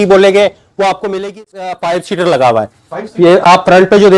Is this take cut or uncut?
cut